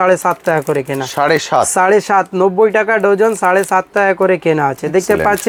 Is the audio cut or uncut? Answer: uncut